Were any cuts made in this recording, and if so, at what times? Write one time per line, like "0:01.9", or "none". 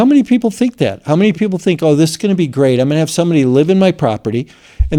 none